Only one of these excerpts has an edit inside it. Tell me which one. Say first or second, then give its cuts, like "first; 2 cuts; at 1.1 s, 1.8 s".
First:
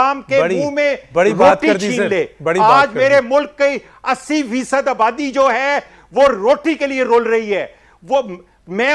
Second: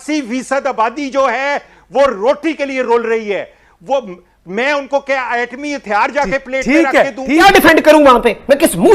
second; 1 cut; at 7.4 s